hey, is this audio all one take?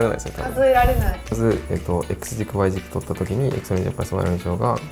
no; 1 cut; at 1.4 s

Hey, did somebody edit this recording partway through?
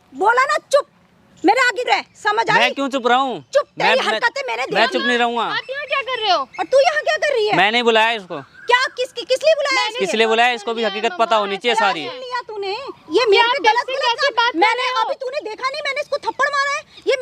no; 0 cuts

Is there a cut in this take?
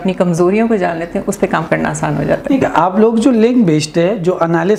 no; 0 cuts

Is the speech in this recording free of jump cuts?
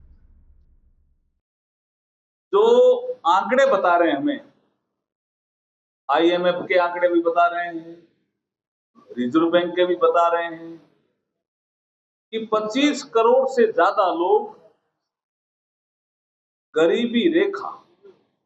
yes; 0 cuts

